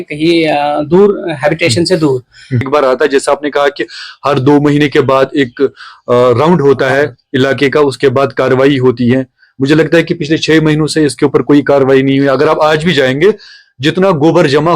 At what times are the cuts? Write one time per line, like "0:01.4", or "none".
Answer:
0:02.7